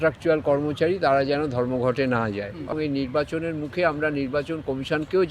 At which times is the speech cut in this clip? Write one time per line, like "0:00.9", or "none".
0:02.7